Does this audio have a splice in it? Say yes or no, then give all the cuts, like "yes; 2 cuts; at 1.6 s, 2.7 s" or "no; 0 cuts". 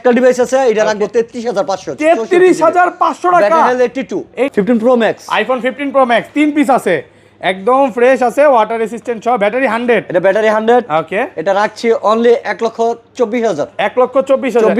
yes; 1 cut; at 4.5 s